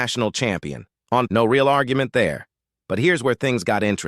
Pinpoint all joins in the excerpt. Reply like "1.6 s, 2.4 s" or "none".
1.3 s